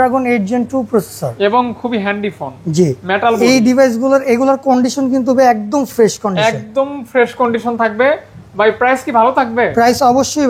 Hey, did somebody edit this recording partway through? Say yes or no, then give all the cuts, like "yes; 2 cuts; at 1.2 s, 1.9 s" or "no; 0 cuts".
no; 0 cuts